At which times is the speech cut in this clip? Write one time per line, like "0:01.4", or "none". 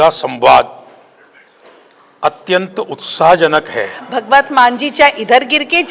0:04.0